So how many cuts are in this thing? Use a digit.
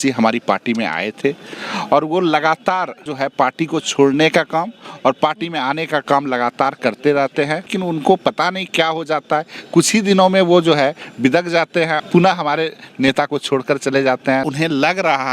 4